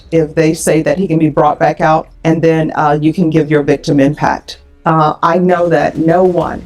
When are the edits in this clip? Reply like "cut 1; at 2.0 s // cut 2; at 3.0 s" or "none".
cut 1; at 2.1 s // cut 2; at 4.7 s